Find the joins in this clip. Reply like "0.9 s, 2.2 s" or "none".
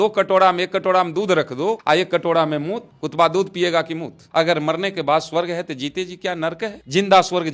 1.8 s, 4.3 s